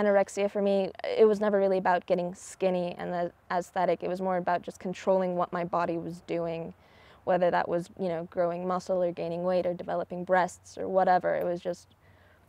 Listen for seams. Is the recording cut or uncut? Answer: cut